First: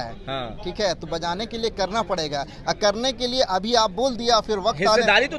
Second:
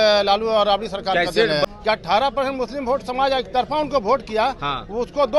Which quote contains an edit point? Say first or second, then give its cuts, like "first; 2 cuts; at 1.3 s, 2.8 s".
second; 1 cut; at 1.7 s